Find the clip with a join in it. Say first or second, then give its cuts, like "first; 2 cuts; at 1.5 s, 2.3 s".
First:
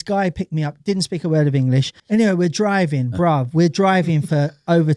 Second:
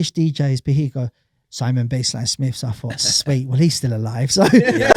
first; 1 cut; at 1.9 s